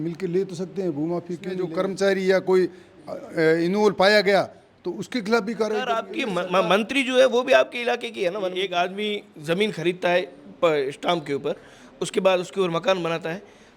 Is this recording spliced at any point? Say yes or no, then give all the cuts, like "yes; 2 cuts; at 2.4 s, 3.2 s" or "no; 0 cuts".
yes; 3 cuts; at 1.6 s, 6.0 s, 8.6 s